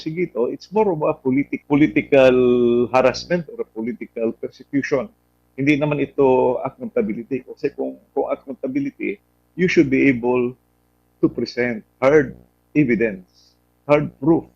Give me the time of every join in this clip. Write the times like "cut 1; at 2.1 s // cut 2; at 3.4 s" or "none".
cut 1; at 1.6 s

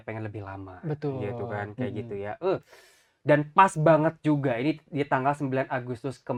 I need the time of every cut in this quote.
none

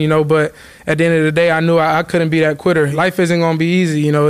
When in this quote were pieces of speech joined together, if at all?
cut 1; at 2.9 s

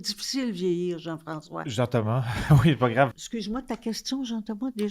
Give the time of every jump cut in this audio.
cut 1; at 3.1 s

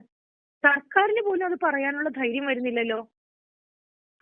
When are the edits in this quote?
none

